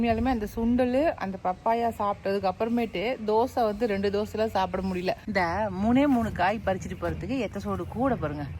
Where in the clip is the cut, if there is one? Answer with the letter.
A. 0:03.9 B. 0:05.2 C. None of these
B